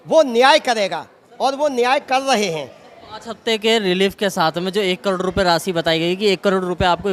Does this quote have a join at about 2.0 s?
no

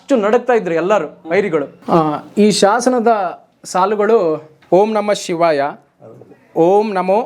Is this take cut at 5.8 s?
no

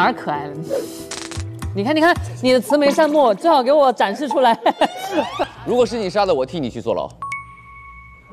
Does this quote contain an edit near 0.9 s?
no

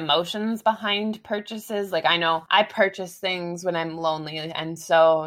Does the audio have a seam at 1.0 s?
no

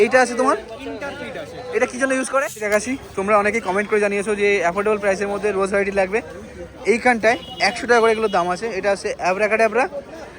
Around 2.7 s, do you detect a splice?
yes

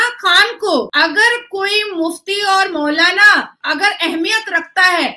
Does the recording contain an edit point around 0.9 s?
yes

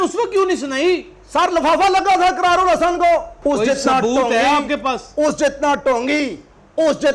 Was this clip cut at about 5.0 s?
no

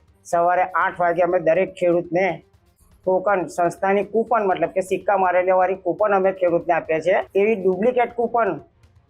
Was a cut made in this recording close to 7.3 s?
yes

